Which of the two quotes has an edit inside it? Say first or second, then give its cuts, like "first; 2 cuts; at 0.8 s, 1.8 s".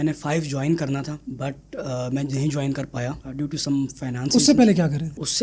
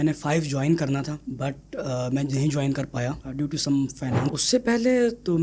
second; 1 cut; at 4.2 s